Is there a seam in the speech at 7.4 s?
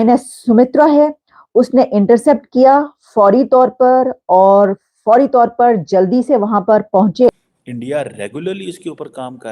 yes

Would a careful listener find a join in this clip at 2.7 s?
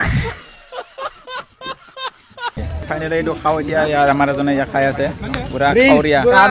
yes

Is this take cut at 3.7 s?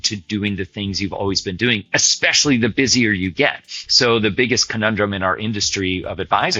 no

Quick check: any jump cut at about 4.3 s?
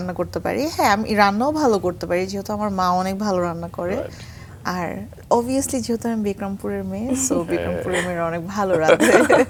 no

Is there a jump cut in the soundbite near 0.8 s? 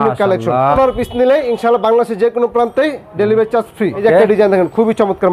yes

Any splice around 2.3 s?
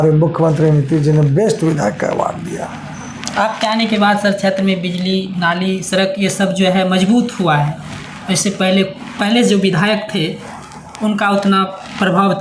no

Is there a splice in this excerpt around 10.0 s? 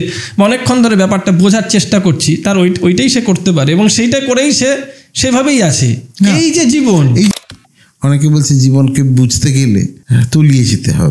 yes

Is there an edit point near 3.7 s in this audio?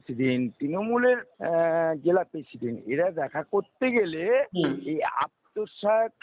no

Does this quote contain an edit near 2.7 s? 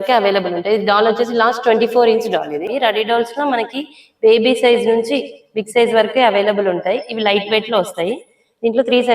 yes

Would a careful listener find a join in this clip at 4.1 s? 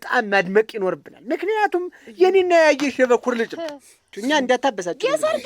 yes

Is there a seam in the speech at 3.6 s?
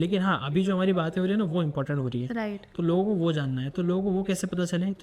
no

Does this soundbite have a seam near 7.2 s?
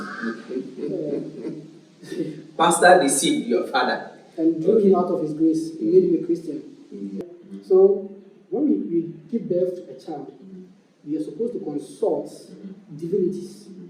yes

